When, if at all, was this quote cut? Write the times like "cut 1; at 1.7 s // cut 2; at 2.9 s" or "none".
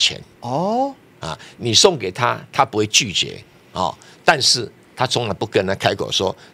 none